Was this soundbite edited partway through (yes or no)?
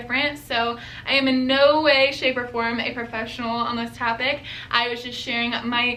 no